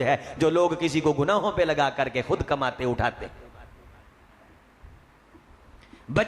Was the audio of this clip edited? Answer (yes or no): no